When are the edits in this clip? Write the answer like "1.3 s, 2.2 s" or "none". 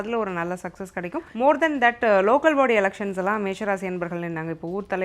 1.3 s